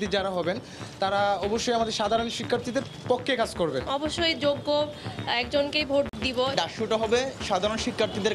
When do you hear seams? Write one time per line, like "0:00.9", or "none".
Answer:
0:03.8
0:06.3